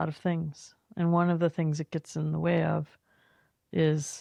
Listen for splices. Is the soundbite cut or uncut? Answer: uncut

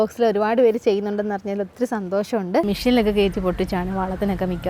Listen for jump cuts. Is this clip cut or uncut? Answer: cut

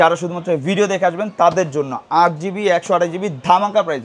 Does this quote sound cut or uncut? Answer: uncut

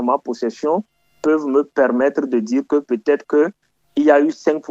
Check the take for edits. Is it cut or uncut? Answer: uncut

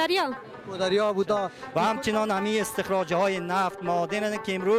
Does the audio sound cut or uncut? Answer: cut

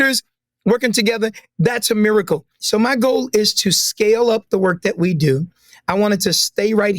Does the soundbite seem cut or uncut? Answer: cut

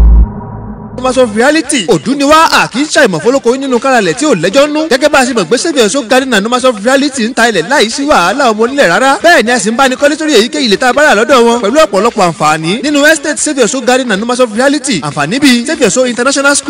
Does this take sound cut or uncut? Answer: cut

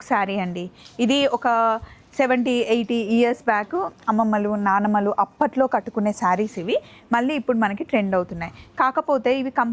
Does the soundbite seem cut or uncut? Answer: uncut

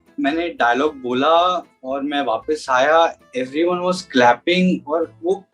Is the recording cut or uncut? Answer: uncut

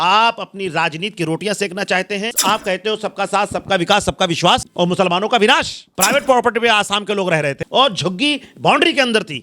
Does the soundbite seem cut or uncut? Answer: cut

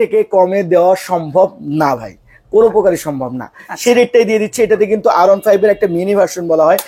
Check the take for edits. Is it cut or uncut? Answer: uncut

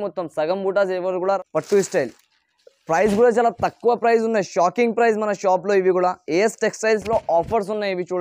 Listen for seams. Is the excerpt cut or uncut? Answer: cut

